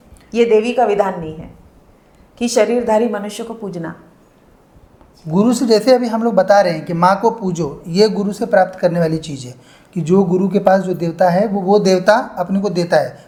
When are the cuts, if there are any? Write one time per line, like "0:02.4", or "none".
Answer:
none